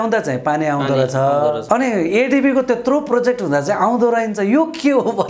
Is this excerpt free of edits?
no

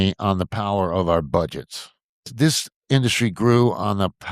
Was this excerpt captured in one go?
no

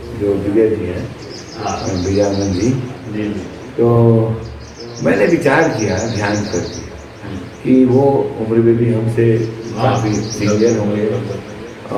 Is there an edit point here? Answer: no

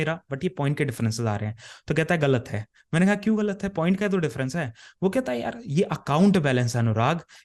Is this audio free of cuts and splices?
yes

